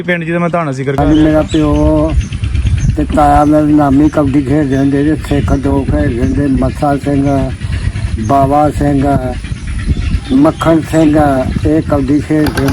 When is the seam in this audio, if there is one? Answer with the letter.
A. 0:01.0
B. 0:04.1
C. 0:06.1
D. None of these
A